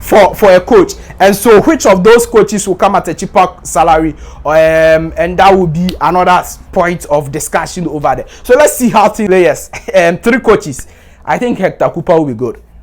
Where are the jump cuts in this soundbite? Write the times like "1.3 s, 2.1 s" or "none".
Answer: 9.2 s